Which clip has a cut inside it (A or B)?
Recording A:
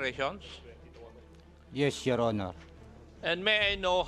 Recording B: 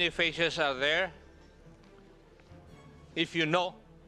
B